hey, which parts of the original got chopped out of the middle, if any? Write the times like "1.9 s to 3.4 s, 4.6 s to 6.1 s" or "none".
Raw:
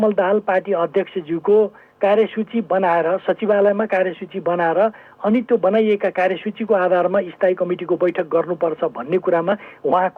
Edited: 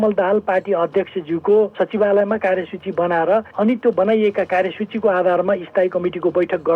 1.7 s to 3.2 s, 5.0 s to 5.1 s